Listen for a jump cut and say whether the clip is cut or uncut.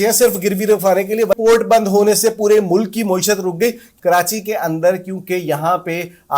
cut